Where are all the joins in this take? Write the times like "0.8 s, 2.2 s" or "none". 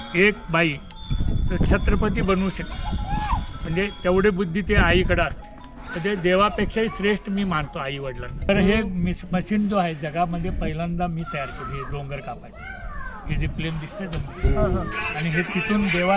8.4 s

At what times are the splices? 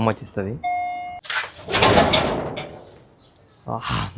1.2 s

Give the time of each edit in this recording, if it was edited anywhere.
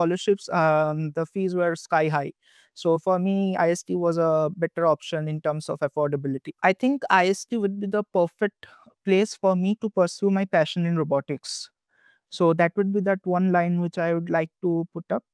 6.5 s

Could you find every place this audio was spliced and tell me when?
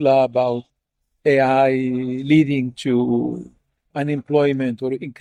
none

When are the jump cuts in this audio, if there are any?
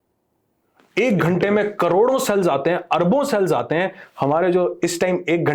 none

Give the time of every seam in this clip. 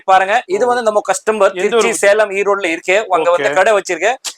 none

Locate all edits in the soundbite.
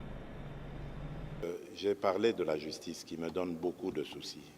1.4 s

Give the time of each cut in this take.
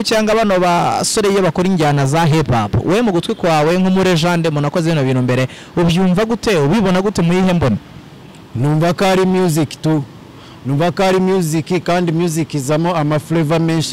none

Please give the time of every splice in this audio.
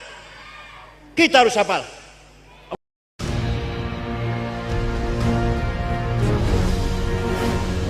2.8 s

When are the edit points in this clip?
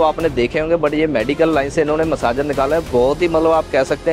none

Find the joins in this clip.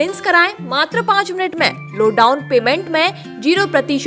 none

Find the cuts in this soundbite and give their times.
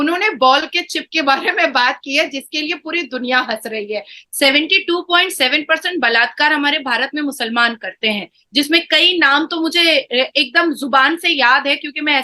4.2 s

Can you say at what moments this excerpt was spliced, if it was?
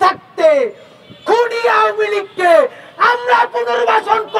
none

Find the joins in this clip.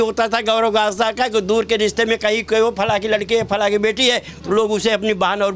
none

